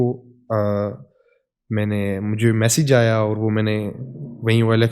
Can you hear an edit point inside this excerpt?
no; 0 cuts

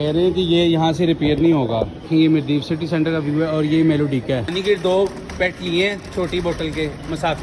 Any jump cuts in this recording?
yes; 1 cut; at 4.5 s

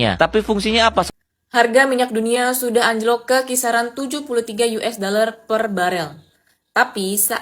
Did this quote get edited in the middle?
yes; 1 cut; at 1.1 s

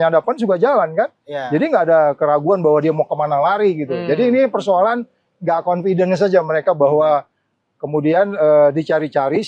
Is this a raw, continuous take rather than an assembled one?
yes; 0 cuts

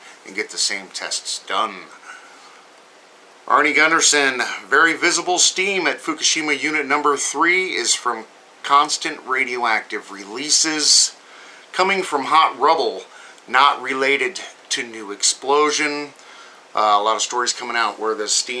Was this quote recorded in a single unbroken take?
no; 1 cut; at 6.6 s

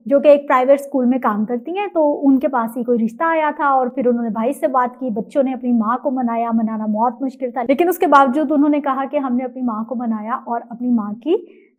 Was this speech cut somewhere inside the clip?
no; 0 cuts

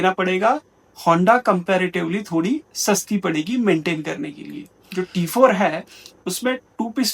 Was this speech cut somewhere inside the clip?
yes; 1 cut; at 4.8 s

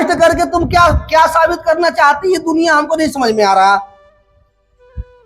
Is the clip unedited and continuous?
yes; 0 cuts

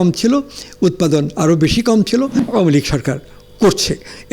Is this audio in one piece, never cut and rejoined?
no; 1 cut; at 2.4 s

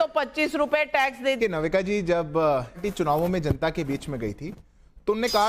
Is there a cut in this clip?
yes; 2 cuts; at 1.4 s, 2.8 s

